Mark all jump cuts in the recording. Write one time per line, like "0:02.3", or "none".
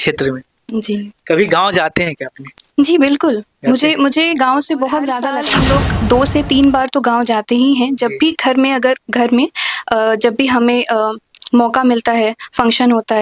0:05.4